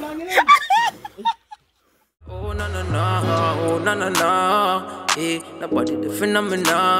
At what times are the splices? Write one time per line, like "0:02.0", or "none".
0:02.4